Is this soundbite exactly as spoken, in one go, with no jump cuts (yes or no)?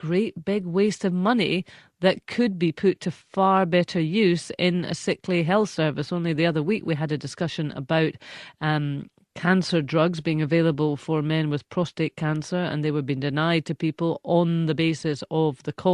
no